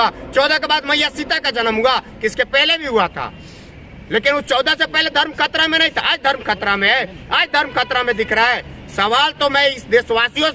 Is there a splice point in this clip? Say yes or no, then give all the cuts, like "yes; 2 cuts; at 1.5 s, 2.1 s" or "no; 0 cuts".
no; 0 cuts